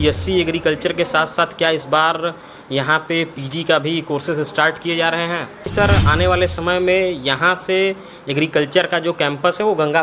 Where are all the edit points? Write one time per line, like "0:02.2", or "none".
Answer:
0:05.7